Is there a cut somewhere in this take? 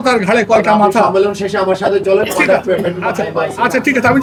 no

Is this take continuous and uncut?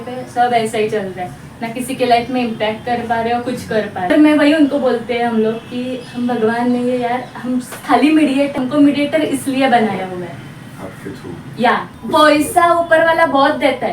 no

